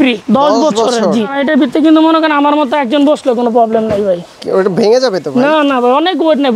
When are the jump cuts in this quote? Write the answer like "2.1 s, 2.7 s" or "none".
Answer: 1.4 s